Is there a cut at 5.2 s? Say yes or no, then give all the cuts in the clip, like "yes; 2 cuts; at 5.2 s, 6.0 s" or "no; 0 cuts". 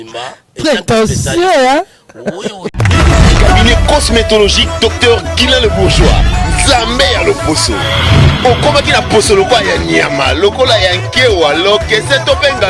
no; 1 cut; at 2.7 s